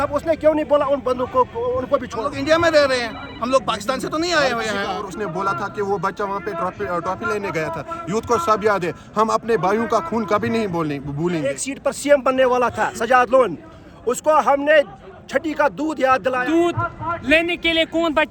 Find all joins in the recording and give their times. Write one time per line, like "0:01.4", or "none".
0:02.2
0:05.0
0:11.5
0:16.4